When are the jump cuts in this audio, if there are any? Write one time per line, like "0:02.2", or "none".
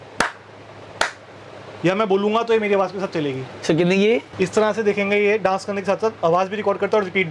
0:04.3